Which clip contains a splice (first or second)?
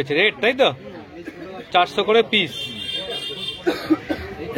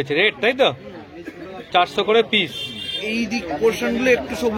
second